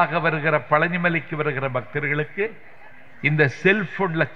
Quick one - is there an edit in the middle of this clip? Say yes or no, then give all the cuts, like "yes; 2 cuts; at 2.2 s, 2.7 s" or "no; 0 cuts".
no; 0 cuts